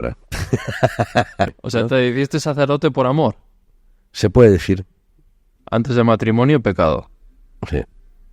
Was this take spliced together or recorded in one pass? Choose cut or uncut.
cut